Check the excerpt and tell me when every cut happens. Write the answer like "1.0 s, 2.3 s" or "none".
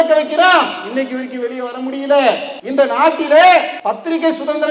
2.5 s, 3.7 s